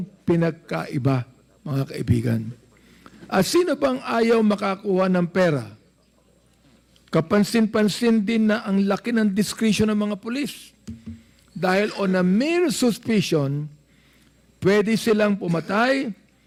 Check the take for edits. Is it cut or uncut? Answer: uncut